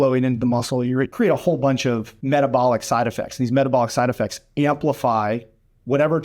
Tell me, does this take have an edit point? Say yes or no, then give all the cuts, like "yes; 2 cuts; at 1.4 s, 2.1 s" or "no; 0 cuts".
yes; 2 cuts; at 1.1 s, 2.1 s